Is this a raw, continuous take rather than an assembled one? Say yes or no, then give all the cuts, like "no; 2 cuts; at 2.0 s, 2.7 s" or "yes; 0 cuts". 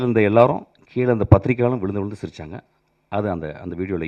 yes; 0 cuts